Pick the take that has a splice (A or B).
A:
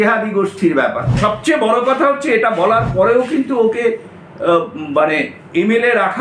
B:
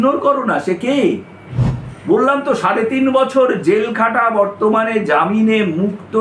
A